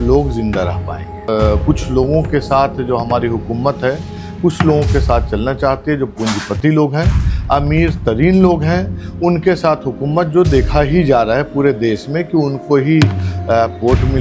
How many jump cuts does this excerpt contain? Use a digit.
1